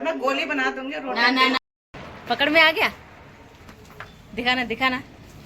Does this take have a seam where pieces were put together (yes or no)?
yes